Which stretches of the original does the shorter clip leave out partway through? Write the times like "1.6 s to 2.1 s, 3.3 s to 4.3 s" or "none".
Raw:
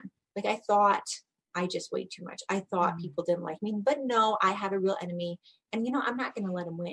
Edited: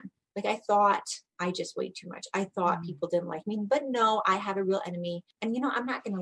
1.2 s to 1.4 s, 5.4 s to 5.6 s